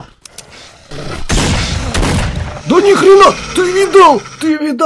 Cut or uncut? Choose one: cut